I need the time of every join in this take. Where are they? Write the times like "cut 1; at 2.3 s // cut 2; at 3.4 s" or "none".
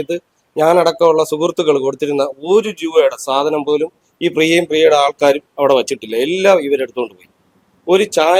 none